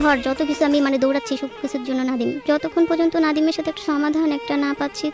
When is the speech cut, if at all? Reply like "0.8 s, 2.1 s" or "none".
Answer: 2.4 s, 3.8 s